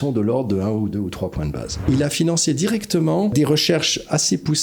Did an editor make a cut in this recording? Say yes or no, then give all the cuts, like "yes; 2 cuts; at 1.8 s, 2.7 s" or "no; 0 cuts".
yes; 2 cuts; at 1.9 s, 3.3 s